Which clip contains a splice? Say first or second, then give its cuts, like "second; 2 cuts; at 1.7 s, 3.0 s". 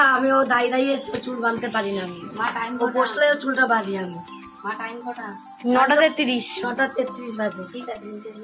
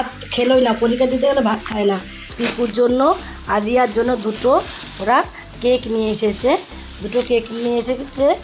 second; 1 cut; at 2.2 s